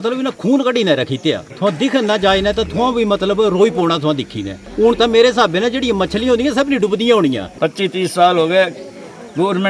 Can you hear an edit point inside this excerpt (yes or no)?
yes